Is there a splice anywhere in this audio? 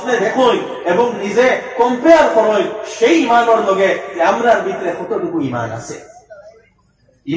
no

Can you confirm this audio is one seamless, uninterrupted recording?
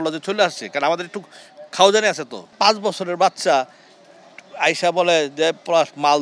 no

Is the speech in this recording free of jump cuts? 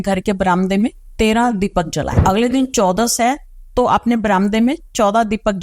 no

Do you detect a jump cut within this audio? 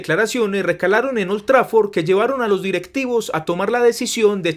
no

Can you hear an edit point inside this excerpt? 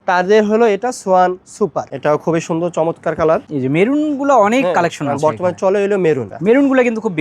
yes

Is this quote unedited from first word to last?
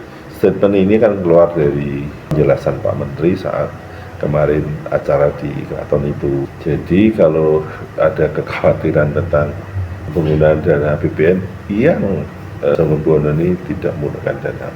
no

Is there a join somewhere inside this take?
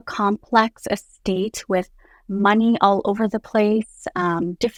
no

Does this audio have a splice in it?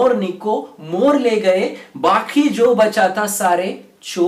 no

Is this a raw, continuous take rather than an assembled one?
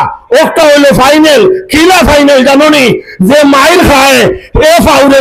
yes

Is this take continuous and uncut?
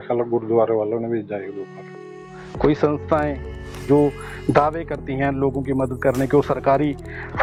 yes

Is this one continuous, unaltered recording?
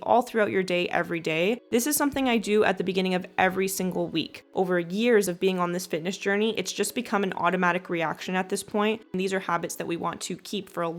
no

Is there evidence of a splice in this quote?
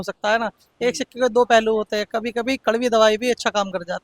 no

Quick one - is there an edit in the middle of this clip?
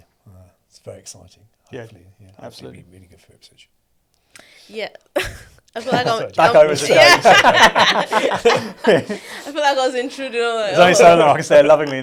no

